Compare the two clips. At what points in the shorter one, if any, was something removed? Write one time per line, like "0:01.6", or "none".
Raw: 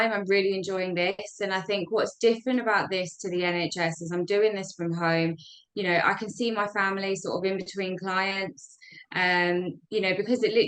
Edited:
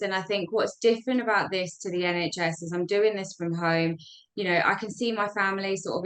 none